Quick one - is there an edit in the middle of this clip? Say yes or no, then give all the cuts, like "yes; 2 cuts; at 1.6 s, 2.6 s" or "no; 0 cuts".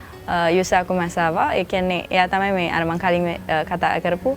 no; 0 cuts